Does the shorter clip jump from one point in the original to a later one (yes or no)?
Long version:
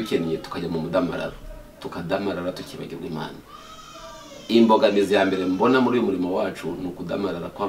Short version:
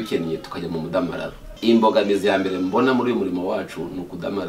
yes